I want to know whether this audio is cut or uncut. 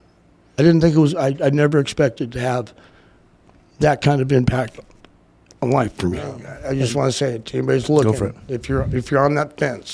cut